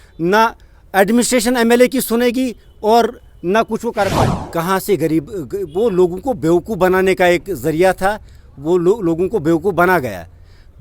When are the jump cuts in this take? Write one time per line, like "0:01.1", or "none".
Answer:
0:04.3

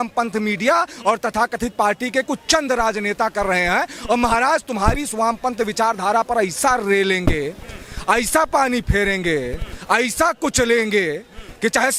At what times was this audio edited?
none

